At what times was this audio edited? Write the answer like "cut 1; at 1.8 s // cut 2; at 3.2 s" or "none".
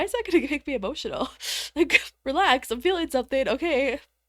cut 1; at 2.1 s